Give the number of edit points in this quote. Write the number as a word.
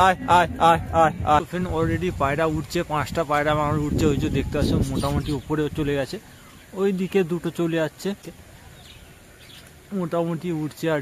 two